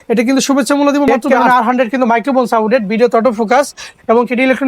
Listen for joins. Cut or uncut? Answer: cut